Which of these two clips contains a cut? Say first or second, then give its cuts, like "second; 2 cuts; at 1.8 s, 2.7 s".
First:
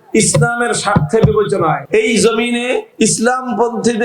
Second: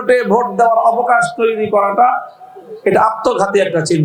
first; 2 cuts; at 1.8 s, 2.9 s